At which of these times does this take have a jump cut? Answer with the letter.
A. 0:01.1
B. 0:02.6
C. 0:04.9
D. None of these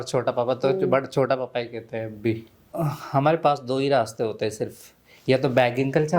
B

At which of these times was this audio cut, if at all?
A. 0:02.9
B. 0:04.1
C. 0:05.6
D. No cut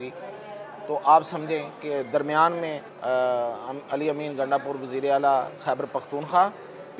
A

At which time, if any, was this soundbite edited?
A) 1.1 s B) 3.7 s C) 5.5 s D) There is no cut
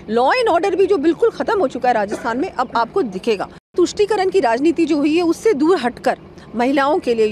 B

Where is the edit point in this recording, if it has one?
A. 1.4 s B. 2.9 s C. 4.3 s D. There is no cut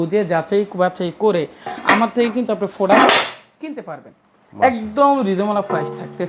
D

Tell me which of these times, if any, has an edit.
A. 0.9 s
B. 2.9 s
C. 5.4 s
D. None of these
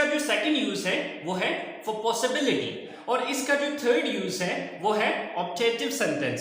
B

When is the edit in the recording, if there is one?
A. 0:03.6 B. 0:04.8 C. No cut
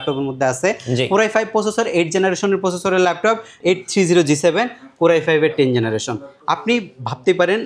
A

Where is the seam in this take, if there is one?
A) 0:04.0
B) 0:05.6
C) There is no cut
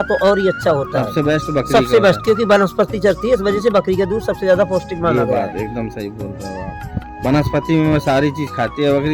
C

